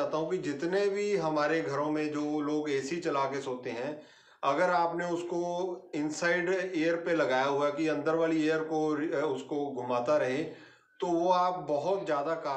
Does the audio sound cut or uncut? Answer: uncut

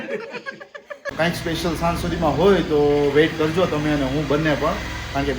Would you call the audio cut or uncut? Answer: cut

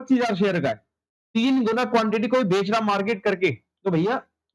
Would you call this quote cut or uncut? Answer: uncut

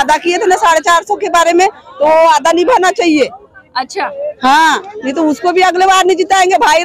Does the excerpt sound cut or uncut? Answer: uncut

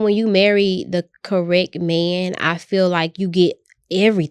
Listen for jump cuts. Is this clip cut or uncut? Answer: uncut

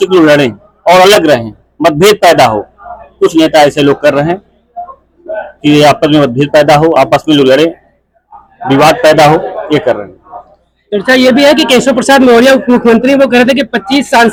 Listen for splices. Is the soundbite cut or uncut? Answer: uncut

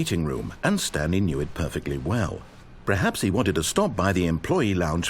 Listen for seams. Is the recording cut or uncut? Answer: uncut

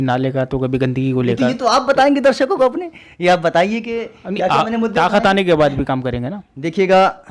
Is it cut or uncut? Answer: uncut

